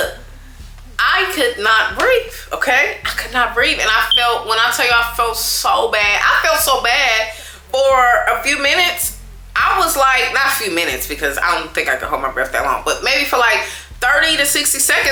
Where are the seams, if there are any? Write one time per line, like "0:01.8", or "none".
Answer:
none